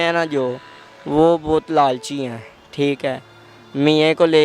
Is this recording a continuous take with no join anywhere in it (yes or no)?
yes